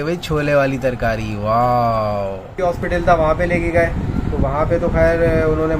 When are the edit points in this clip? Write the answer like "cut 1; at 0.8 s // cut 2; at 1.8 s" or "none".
cut 1; at 2.6 s